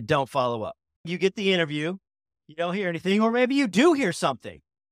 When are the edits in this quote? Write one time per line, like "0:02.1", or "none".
0:01.1
0:02.4